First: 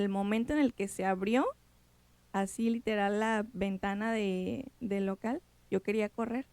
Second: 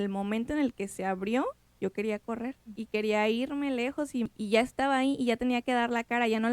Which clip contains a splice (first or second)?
second